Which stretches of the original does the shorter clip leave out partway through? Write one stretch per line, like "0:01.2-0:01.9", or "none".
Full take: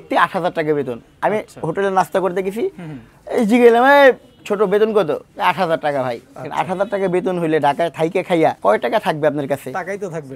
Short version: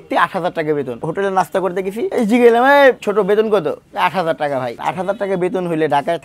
0:01.0-0:01.6
0:02.7-0:03.3
0:04.2-0:04.5
0:06.2-0:06.5